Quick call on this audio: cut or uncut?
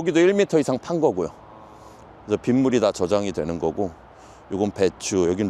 uncut